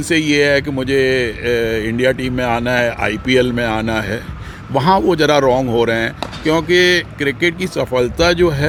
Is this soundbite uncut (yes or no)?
yes